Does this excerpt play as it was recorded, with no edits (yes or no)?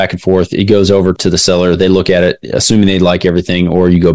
no